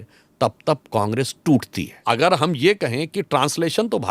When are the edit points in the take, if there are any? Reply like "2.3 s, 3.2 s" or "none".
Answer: 2.0 s